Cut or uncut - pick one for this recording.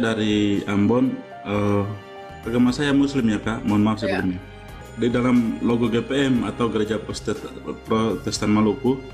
cut